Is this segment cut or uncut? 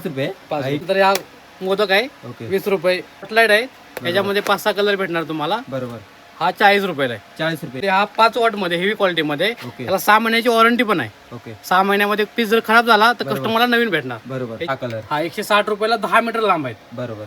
cut